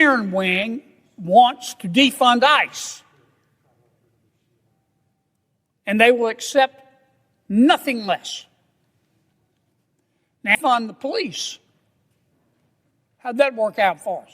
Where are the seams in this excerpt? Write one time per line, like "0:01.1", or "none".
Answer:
0:10.5